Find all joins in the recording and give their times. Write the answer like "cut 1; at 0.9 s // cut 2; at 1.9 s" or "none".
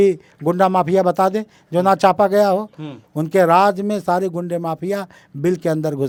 none